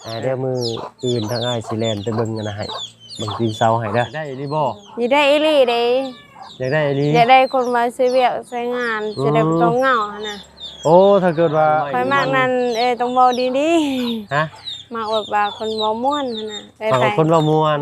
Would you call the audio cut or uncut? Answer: cut